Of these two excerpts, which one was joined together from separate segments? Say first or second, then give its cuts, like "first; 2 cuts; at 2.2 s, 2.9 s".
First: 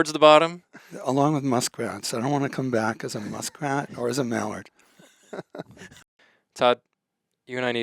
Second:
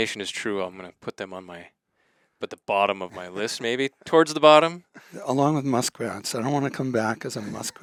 first; 1 cut; at 5.8 s